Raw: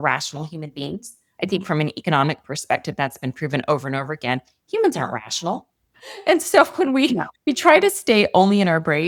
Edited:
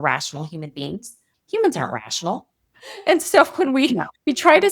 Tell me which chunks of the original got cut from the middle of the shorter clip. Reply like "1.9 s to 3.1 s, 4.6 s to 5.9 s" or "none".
1.3 s to 4.5 s